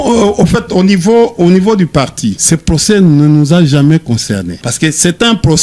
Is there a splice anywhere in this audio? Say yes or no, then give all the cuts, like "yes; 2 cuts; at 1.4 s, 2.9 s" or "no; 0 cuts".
yes; 2 cuts; at 2.4 s, 4.6 s